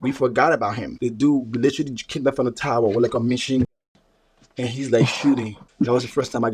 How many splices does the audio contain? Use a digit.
2